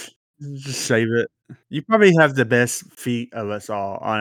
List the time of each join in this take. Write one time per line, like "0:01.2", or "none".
none